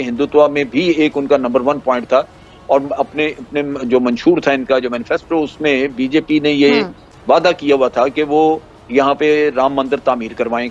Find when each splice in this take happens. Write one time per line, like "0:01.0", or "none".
none